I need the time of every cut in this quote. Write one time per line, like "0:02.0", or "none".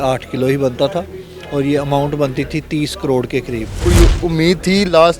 0:03.8